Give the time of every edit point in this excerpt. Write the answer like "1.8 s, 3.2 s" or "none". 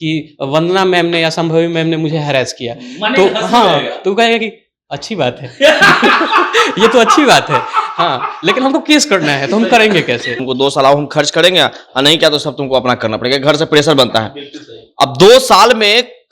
10.4 s